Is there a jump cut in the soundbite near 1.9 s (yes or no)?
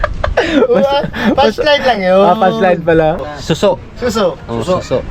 no